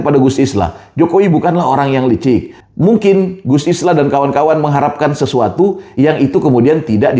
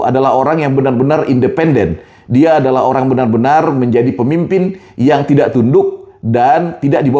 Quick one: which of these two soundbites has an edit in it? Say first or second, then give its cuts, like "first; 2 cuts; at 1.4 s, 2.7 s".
first; 1 cut; at 2.5 s